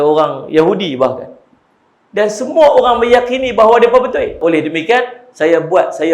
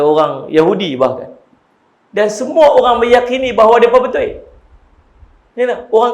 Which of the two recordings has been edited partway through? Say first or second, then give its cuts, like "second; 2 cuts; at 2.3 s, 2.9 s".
first; 1 cut; at 4.4 s